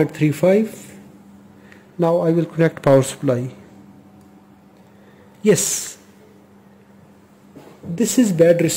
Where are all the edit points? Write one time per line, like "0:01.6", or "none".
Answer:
none

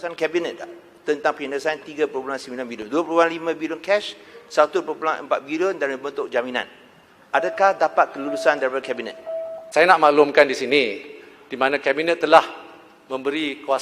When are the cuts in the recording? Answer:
0:09.6

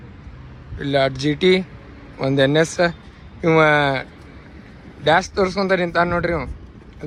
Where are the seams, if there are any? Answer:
none

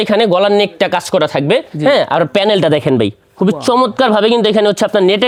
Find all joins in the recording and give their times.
none

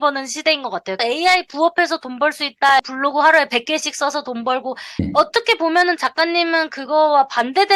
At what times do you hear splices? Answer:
0:01.0
0:02.8
0:04.9

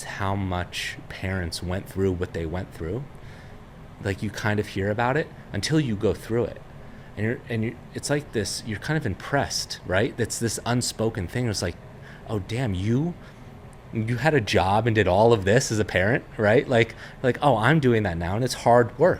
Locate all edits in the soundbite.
none

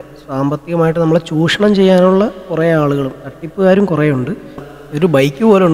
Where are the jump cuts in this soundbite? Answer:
0:04.6

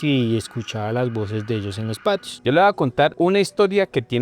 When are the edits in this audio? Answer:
0:02.3
0:03.1

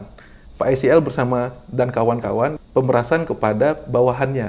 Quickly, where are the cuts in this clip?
0:02.6

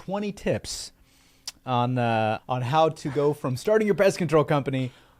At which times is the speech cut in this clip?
0:02.4

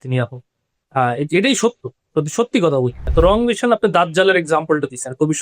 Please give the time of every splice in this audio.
0:03.0

